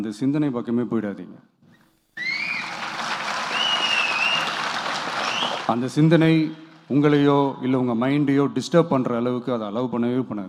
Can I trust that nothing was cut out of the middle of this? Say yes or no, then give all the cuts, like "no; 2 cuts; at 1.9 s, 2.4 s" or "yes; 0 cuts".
yes; 0 cuts